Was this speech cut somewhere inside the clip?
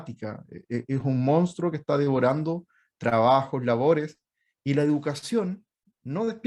no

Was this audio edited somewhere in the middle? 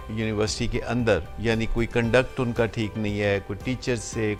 no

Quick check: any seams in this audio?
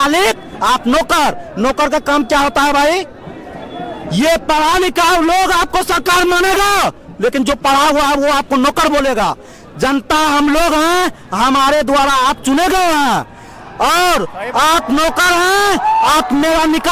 no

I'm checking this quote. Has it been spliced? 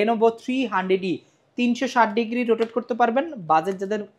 no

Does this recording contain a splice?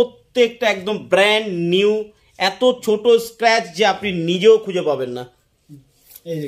no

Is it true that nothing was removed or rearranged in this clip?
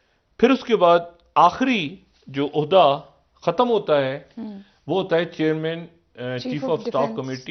yes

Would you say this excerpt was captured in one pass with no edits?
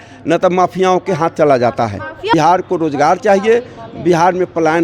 no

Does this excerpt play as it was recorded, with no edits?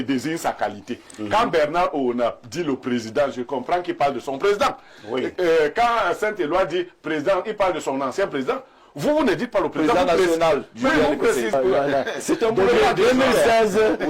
no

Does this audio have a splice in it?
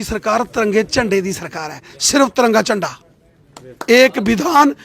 no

